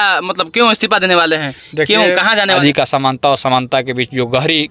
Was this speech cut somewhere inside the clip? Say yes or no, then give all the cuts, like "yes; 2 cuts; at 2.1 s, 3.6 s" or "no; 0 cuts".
yes; 1 cut; at 2.6 s